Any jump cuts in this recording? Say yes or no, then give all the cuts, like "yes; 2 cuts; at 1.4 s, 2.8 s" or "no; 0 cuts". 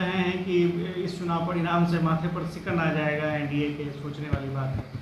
no; 0 cuts